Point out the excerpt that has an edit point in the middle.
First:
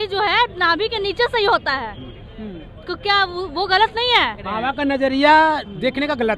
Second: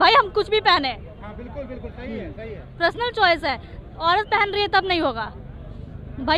first; 1 cut; at 4.5 s

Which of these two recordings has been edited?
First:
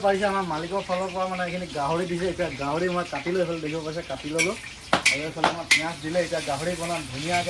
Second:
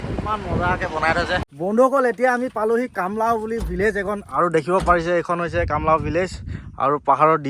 second; 1 cut; at 1.5 s

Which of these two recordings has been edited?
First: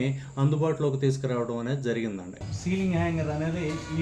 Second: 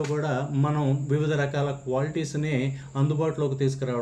first; 1 cut; at 2.4 s

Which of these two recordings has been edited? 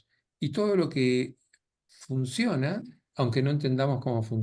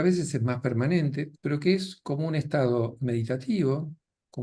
second; 1 cut; at 1.3 s

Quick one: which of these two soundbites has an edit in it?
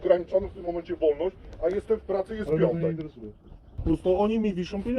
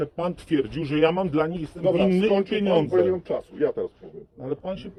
first; 1 cut; at 3.8 s

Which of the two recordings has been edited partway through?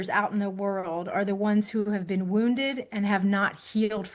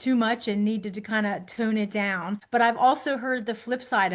second; 1 cut; at 2.4 s

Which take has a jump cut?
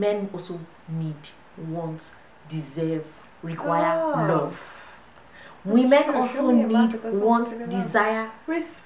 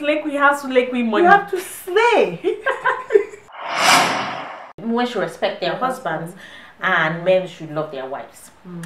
second; 2 cuts; at 3.4 s, 4.7 s

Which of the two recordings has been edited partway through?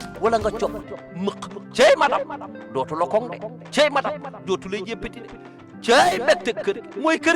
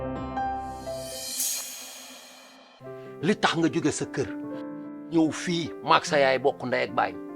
second; 1 cut; at 2.7 s

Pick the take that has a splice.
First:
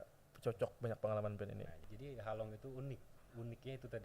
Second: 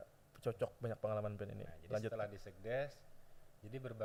first; 1 cut; at 1.7 s

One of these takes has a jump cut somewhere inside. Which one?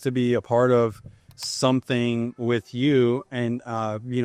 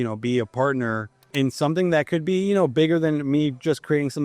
second; 1 cut; at 1.2 s

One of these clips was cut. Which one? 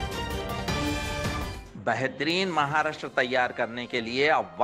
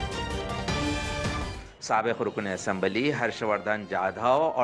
second; 1 cut; at 1.6 s

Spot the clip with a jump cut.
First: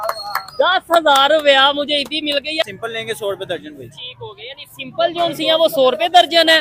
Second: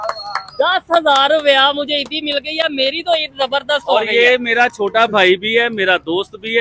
first; 1 cut; at 2.6 s

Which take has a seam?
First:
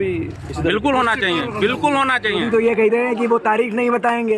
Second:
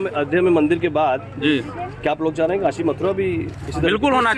first; 1 cut; at 2.4 s

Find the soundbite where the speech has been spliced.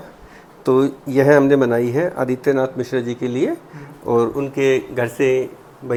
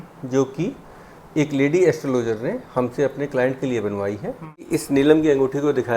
second; 1 cut; at 4.7 s

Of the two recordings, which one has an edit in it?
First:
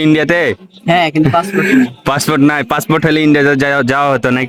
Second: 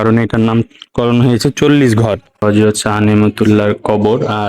second; 1 cut; at 2.4 s

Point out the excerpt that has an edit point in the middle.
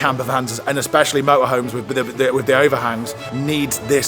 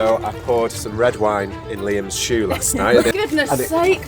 second; 1 cut; at 3.1 s

